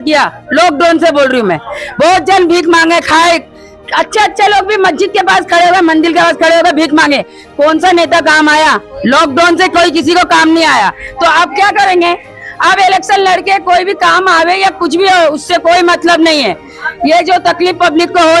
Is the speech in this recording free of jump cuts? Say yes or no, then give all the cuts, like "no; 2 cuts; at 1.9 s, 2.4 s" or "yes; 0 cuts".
yes; 0 cuts